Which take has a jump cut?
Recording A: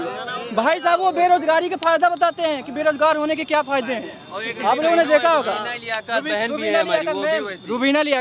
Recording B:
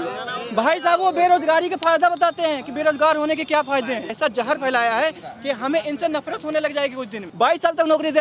B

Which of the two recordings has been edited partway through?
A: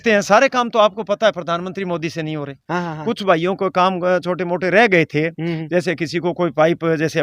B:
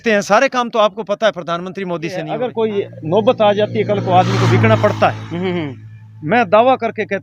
B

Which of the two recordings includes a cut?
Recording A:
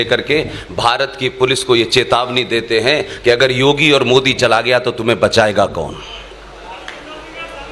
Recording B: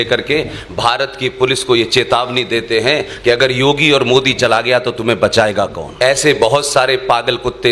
B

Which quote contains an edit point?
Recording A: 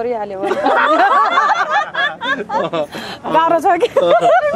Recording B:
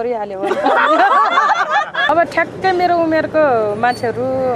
B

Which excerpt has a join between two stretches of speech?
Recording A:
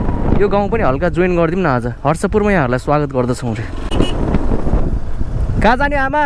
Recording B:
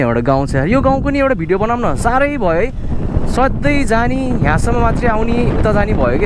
A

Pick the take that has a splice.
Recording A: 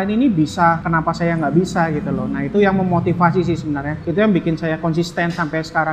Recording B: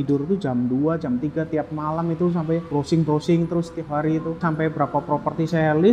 B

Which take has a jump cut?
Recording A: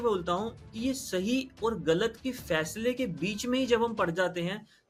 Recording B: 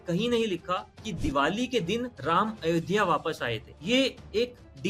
B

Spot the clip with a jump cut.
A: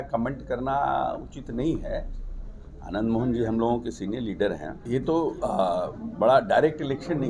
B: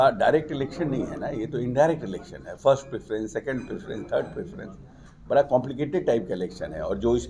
A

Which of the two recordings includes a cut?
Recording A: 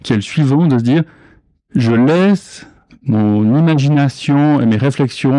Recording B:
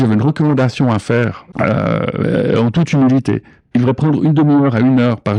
B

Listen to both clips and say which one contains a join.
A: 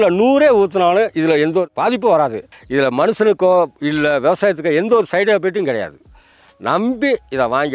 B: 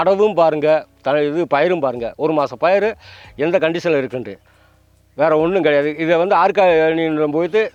A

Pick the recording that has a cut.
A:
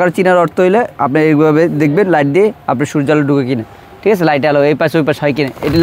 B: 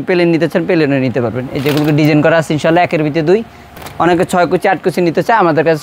B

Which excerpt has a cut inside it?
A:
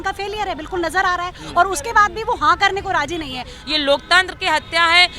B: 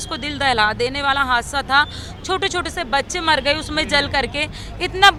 A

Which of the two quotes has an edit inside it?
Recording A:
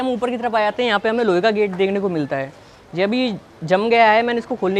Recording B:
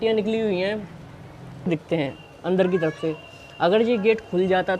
B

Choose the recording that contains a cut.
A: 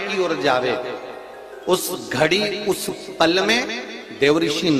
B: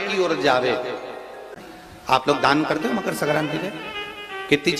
B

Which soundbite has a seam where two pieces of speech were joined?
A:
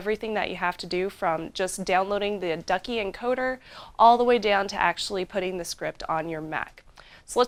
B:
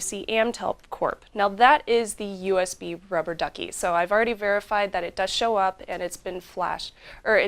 B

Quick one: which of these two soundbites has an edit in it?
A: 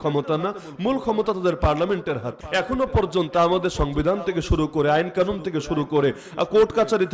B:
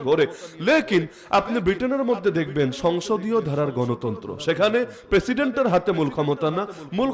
A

